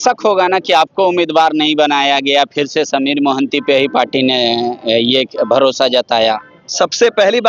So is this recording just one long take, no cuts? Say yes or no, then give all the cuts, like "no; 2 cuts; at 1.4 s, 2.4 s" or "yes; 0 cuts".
yes; 0 cuts